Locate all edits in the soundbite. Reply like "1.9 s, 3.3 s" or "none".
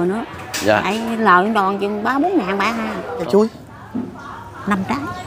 3.2 s